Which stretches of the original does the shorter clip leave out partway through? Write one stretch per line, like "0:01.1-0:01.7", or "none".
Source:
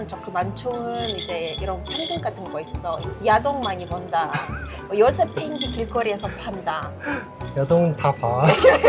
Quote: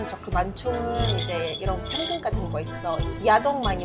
none